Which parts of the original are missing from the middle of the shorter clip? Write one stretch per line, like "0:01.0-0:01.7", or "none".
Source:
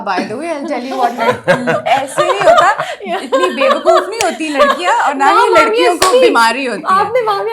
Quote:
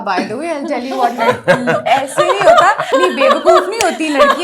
0:02.8-0:03.2